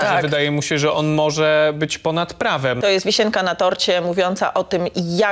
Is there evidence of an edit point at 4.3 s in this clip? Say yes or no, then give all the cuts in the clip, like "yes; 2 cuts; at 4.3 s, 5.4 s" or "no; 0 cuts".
no; 1 cut; at 2.8 s